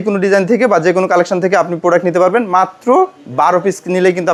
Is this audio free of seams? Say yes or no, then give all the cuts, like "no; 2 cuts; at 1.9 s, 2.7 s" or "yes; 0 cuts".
yes; 0 cuts